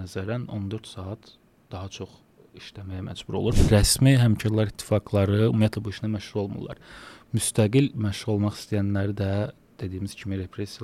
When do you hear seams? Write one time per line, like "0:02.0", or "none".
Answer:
0:03.6